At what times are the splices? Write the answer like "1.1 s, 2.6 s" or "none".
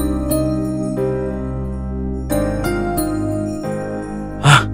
none